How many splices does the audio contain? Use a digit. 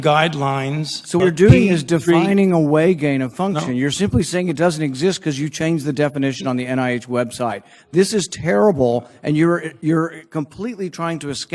1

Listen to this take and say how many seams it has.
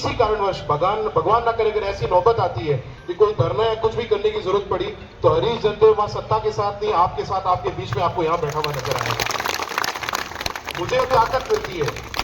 1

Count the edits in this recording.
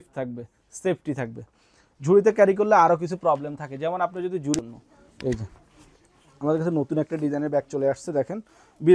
1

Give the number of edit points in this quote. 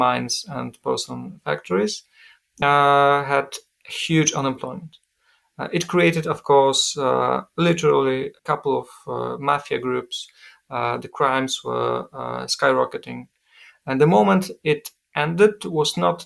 1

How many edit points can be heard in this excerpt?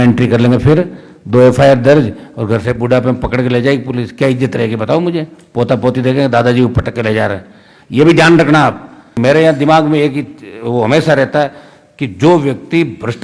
1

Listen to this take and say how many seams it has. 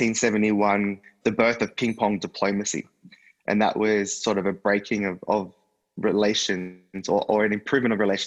1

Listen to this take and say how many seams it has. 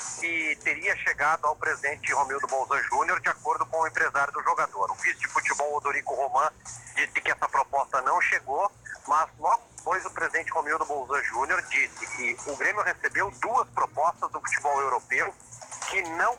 1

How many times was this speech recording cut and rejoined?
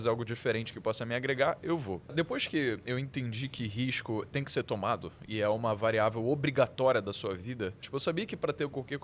2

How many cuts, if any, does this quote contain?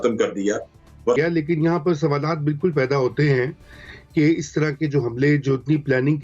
1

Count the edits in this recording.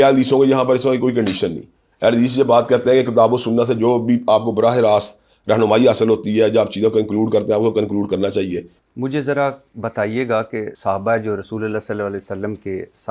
2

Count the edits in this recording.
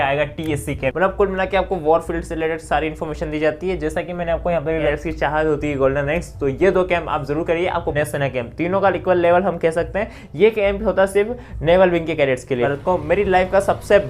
4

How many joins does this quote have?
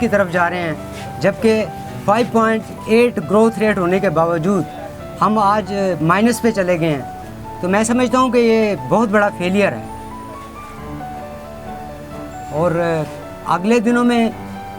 0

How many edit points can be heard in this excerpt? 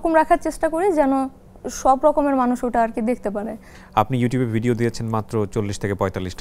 1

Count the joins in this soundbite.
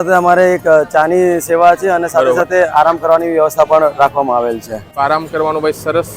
1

